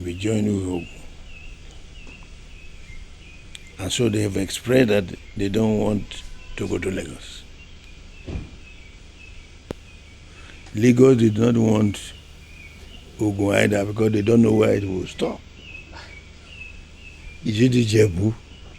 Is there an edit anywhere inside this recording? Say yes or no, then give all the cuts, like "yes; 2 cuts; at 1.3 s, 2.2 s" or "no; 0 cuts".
no; 0 cuts